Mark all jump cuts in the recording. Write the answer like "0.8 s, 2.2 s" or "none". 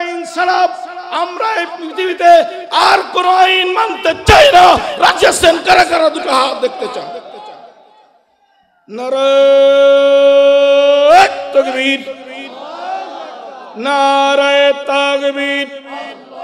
1.7 s

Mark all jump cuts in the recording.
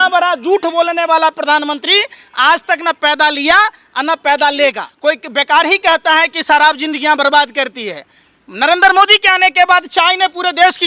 4.9 s

